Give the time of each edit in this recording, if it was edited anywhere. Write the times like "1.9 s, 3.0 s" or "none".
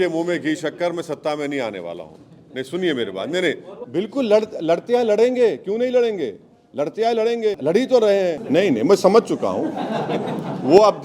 3.7 s, 7.6 s, 8.4 s